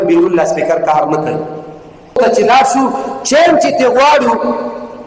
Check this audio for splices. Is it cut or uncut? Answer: cut